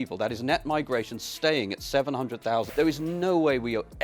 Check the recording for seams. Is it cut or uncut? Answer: cut